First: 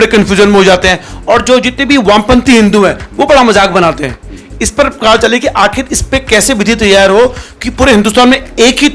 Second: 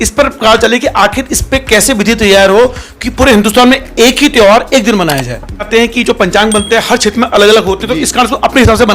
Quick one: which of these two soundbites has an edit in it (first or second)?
second